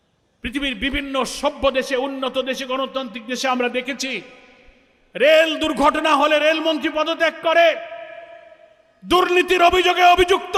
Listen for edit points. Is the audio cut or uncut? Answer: uncut